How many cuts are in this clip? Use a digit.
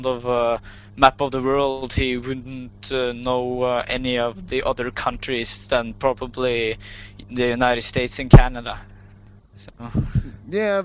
0